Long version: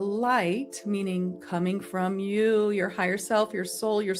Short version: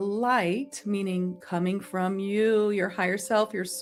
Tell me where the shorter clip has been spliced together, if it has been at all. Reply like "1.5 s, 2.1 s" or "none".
none